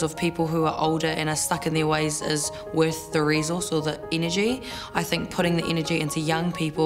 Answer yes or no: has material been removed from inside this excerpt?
yes